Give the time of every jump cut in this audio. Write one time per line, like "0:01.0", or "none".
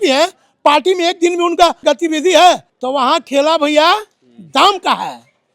0:01.8
0:02.7